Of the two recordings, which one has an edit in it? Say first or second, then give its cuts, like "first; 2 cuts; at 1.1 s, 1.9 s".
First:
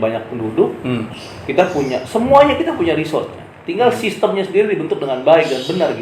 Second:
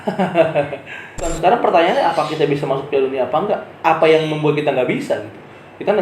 second; 1 cut; at 1.4 s